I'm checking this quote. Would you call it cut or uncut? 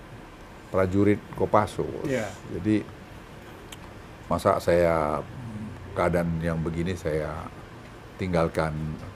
uncut